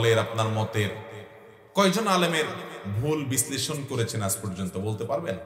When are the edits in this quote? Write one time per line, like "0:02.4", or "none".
none